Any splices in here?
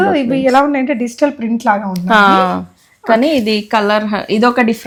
no; 0 cuts

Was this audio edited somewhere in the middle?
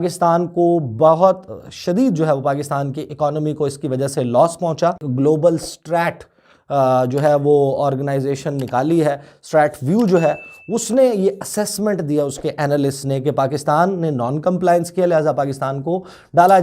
yes; 1 cut; at 5.1 s

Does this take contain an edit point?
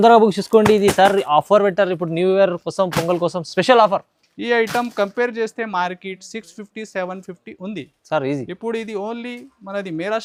no; 0 cuts

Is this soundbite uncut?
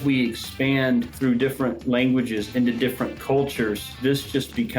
yes; 0 cuts

